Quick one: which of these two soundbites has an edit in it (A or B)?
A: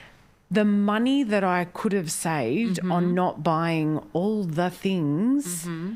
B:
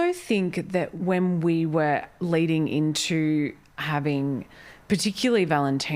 B